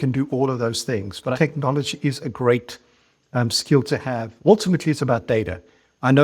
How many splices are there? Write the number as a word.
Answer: two